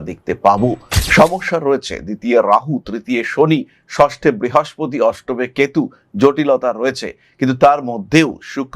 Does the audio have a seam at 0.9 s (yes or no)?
yes